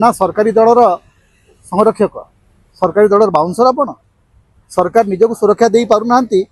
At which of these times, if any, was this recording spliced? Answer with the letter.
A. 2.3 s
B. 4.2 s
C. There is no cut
C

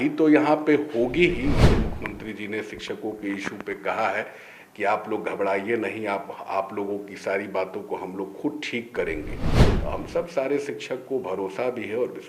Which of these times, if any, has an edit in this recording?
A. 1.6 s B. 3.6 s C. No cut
A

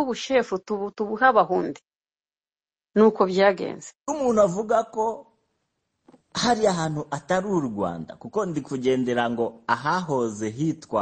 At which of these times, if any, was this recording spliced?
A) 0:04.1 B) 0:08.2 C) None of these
A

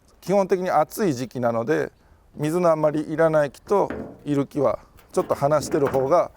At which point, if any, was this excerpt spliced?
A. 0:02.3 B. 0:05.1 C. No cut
A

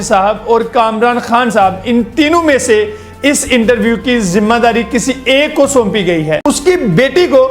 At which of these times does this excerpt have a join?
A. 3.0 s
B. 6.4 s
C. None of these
B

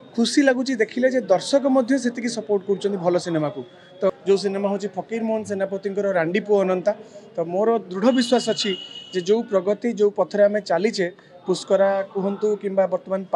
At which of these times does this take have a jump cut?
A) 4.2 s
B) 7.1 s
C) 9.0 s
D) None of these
A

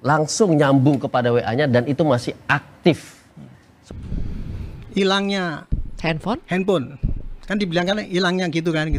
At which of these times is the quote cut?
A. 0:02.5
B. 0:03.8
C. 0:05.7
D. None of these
B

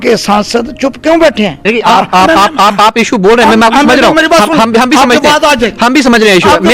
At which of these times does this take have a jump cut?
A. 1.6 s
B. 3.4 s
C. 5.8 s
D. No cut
A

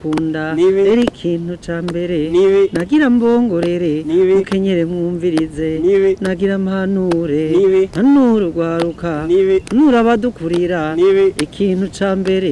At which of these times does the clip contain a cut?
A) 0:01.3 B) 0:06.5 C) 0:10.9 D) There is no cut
D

